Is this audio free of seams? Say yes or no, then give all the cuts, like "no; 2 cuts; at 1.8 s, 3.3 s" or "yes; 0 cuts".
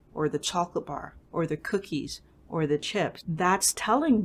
no; 1 cut; at 3.2 s